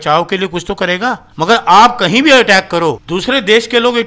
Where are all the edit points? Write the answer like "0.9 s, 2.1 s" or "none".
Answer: 1.2 s, 3.1 s